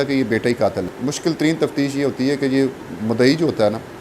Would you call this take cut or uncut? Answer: cut